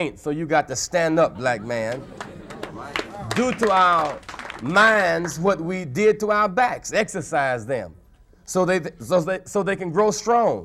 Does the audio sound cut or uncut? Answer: uncut